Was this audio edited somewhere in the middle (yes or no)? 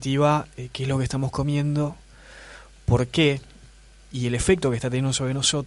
yes